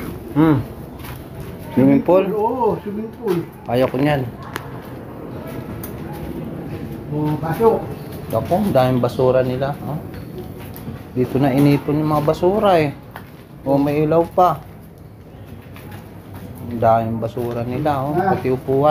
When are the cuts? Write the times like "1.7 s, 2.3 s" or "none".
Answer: none